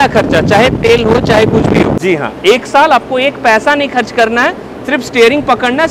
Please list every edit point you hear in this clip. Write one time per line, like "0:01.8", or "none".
0:02.0